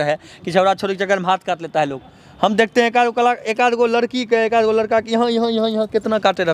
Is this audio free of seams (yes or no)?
yes